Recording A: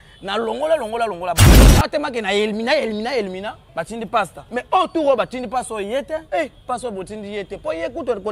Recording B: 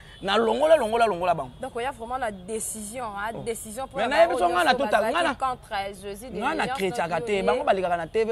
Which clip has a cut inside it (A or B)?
A